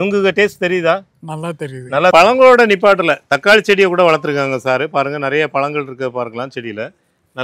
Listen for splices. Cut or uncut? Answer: cut